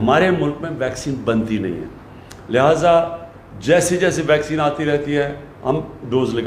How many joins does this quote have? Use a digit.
0